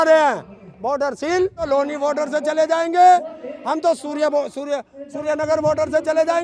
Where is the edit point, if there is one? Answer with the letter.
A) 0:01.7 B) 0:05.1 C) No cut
A